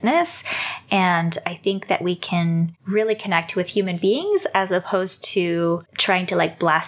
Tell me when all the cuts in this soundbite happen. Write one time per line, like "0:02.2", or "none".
0:02.8
0:05.9